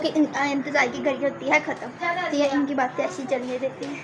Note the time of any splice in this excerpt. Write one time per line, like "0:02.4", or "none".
none